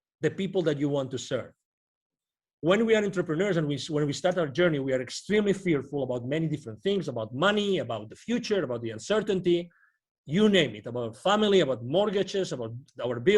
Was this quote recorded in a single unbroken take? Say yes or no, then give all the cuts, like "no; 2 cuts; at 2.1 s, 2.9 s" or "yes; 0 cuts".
yes; 0 cuts